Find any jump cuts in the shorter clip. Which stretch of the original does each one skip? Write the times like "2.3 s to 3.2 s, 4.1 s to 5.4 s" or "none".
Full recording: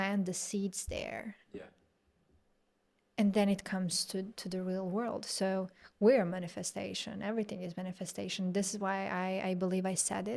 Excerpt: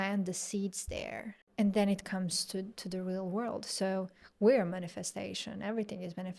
1.4 s to 3.0 s